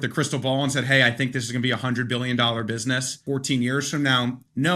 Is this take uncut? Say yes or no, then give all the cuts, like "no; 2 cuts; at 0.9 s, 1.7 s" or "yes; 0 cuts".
no; 1 cut; at 3.2 s